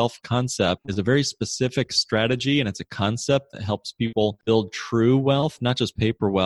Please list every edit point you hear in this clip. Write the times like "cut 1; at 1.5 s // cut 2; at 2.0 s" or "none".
cut 1; at 0.8 s // cut 2; at 4.4 s

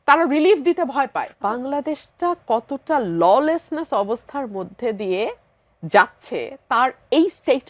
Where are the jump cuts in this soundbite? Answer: cut 1; at 1.3 s

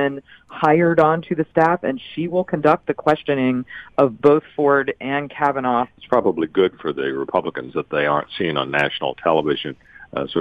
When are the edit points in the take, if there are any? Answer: cut 1; at 5.9 s

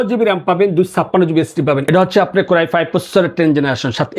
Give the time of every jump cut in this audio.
cut 1; at 1.9 s

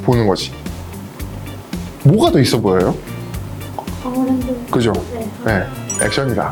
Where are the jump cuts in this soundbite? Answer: none

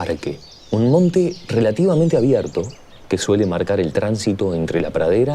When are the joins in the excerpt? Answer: cut 1; at 2.1 s

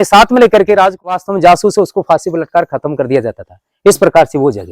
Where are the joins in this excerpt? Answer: cut 1; at 1.1 s

